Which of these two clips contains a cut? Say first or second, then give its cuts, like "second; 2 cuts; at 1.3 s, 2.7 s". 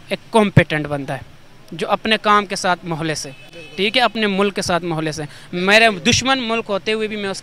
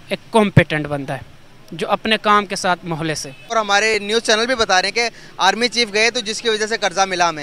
second; 1 cut; at 3.5 s